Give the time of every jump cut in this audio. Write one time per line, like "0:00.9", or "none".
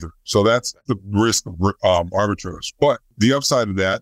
0:00.9
0:03.1